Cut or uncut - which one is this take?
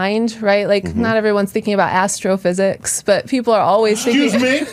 uncut